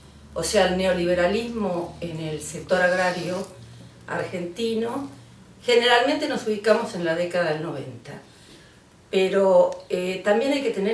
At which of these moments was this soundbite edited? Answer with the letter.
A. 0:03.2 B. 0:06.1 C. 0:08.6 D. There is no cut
B